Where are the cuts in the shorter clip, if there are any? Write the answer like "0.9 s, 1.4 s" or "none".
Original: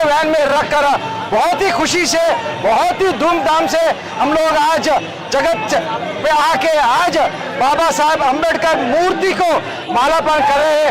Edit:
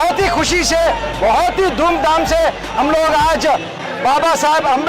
3.8 s